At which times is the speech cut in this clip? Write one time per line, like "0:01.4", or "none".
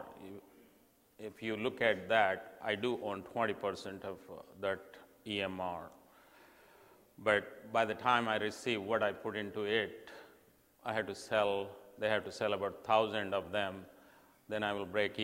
0:13.5